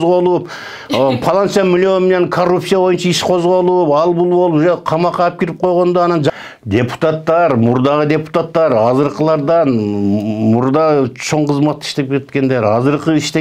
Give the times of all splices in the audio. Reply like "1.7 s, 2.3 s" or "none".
6.3 s